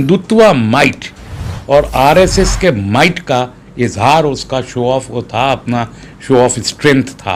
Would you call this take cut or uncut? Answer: uncut